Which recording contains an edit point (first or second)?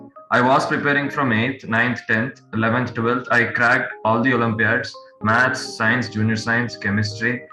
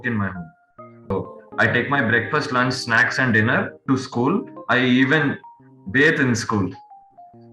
second